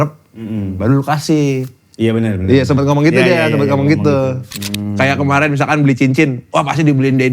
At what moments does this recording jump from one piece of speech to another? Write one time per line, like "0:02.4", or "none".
0:04.5